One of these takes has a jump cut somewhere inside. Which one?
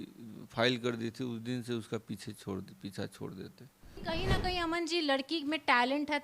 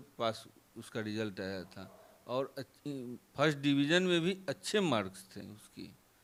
first; 1 cut; at 4.0 s

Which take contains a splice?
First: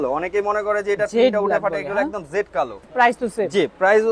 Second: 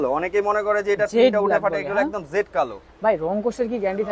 first; 1 cut; at 2.8 s

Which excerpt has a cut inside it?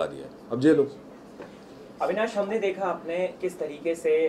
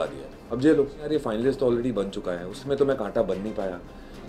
second; 1 cut; at 1.0 s

